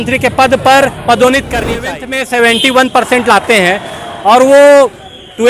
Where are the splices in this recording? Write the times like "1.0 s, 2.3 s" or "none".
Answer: 1.9 s